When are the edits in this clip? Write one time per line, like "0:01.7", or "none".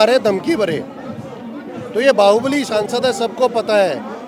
none